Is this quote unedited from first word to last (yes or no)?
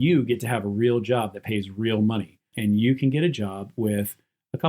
no